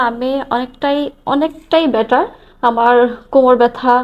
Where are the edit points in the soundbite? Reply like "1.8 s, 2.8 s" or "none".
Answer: none